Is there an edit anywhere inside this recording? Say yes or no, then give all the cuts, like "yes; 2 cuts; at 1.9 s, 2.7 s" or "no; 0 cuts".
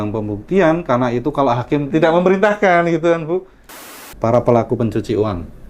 yes; 2 cuts; at 1.9 s, 4.1 s